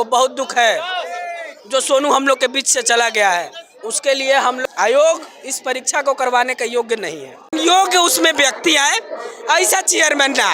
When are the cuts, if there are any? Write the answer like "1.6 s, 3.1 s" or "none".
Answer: 4.6 s, 7.5 s

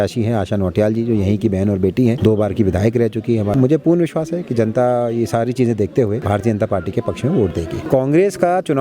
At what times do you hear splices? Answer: 2.2 s, 3.5 s, 6.2 s, 7.9 s

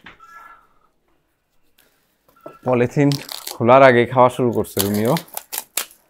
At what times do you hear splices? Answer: 1.7 s

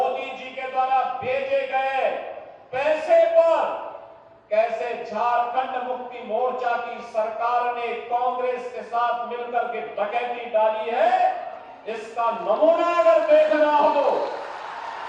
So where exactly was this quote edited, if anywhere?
none

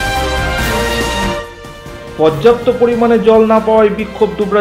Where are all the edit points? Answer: 1.4 s

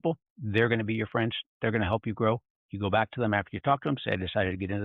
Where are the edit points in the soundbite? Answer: none

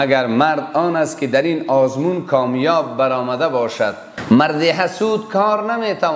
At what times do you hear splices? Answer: 4.1 s

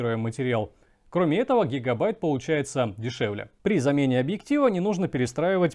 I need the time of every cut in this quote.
3.5 s

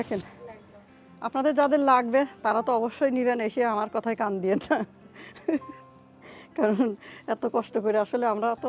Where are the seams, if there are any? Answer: none

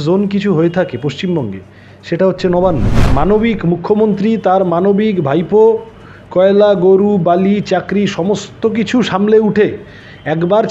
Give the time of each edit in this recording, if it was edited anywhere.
3.0 s

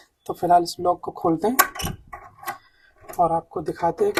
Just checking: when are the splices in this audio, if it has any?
none

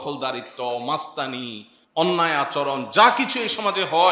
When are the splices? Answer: none

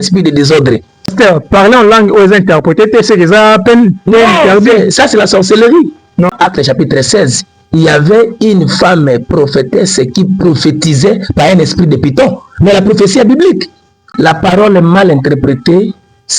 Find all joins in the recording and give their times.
1.1 s, 6.3 s, 14.0 s

